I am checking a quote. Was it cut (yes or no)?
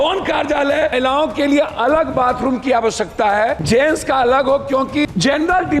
yes